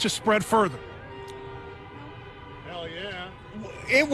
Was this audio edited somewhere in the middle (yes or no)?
no